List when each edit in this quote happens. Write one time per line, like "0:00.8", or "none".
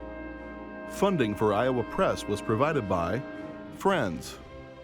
0:01.0